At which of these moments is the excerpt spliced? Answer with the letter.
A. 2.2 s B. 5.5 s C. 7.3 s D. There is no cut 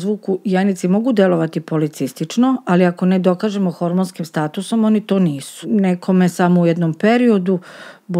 B